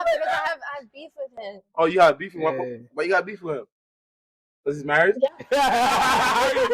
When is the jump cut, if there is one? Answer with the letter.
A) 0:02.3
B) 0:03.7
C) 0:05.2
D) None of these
C